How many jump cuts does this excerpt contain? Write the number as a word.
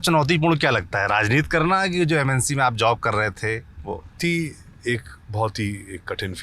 one